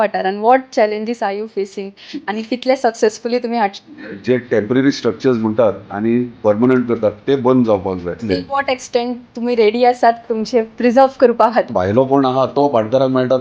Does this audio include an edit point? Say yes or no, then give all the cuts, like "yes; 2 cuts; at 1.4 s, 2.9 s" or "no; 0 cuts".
yes; 3 cuts; at 3.7 s, 8.2 s, 11.7 s